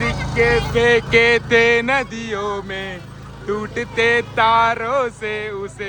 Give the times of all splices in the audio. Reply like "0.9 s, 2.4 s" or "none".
none